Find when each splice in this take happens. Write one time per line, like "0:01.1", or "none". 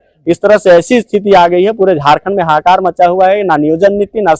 none